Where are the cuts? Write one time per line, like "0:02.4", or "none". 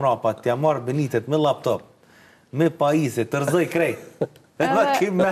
none